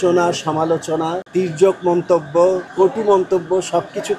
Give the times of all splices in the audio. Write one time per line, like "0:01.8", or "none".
0:01.2
0:02.7